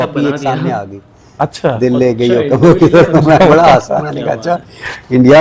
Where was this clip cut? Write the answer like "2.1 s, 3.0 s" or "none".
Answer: none